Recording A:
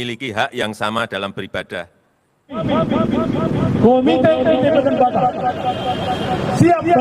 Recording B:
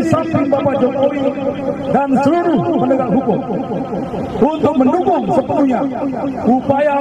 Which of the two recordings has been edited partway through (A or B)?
A